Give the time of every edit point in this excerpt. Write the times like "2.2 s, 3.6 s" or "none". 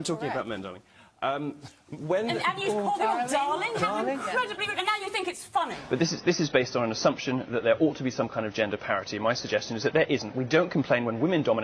5.8 s